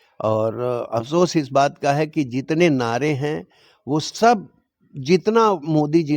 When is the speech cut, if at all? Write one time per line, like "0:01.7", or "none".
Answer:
none